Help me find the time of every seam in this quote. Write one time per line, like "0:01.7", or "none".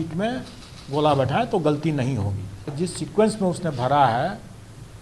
0:02.7